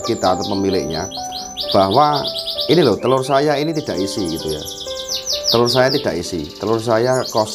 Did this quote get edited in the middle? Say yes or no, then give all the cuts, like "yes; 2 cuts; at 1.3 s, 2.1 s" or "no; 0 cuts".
no; 0 cuts